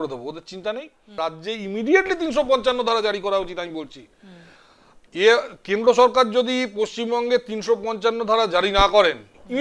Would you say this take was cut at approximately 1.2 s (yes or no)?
yes